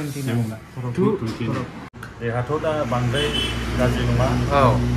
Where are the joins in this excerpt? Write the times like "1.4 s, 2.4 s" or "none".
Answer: 2.1 s